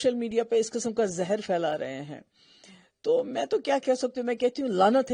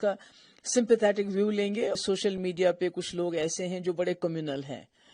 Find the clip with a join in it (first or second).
second